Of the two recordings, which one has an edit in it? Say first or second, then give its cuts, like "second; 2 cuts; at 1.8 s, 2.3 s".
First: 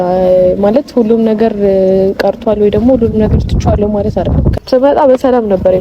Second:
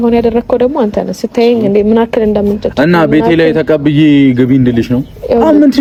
first; 1 cut; at 4.5 s